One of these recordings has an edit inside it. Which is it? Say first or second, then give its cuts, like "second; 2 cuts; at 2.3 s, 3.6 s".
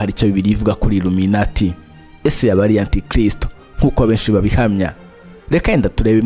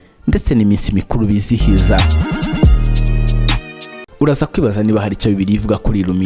second; 1 cut; at 4.0 s